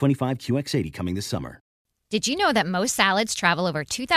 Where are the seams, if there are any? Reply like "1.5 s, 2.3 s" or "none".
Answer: 1.8 s